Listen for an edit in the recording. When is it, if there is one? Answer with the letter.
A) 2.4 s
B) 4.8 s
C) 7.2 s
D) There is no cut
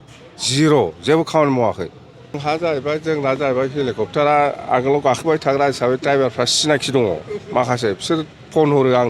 A